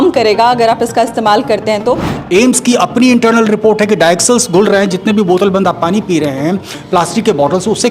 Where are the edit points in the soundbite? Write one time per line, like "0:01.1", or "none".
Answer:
0:02.1